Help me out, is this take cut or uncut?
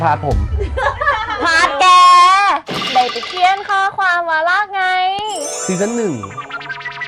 cut